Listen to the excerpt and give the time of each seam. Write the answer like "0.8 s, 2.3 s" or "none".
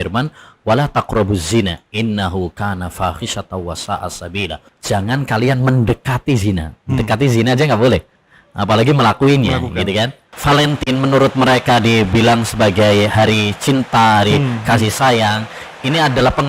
4.7 s, 10.3 s